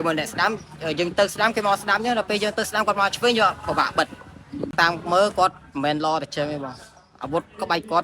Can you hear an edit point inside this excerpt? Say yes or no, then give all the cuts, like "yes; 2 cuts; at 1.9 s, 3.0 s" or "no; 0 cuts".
yes; 1 cut; at 4.7 s